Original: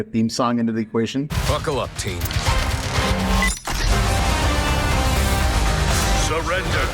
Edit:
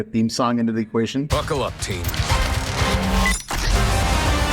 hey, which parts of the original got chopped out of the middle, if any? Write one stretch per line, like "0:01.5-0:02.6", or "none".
0:01.3-0:01.5